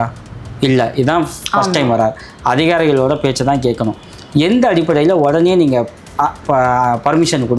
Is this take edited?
no; 0 cuts

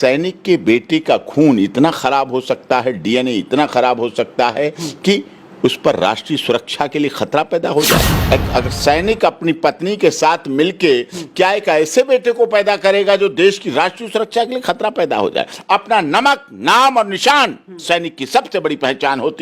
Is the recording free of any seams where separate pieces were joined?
no; 2 cuts; at 8.1 s, 15.5 s

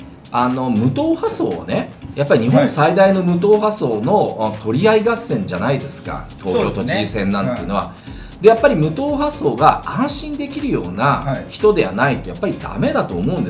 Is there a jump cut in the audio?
no; 0 cuts

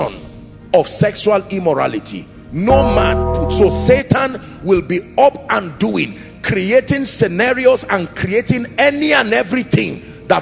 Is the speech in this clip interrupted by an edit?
yes; 1 cut; at 3.3 s

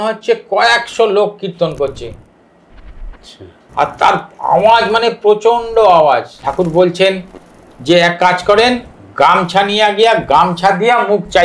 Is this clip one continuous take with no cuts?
no; 1 cut; at 6.4 s

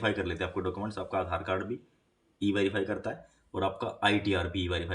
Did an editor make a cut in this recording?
no; 0 cuts

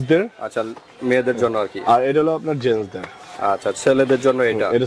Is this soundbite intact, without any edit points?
yes; 0 cuts

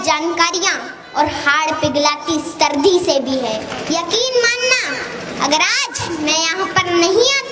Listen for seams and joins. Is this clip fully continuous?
no; 1 cut; at 3.7 s

